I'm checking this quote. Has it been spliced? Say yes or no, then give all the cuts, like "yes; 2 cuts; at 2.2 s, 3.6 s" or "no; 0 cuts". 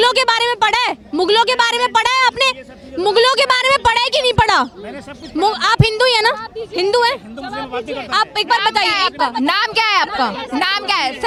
no; 0 cuts